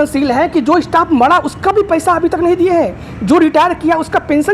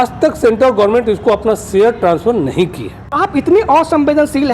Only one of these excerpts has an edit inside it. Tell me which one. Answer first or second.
second